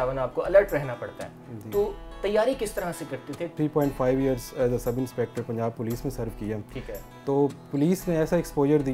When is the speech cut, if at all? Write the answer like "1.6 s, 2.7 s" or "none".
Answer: 3.5 s